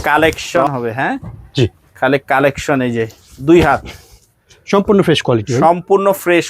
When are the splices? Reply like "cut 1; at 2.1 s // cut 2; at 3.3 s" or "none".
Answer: none